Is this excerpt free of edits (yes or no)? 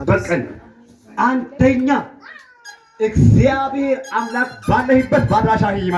yes